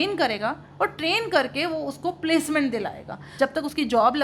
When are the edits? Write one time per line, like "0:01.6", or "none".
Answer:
0:03.3